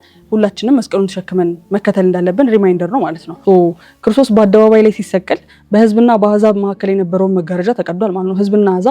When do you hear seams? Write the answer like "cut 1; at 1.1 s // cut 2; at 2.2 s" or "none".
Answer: cut 1; at 3.3 s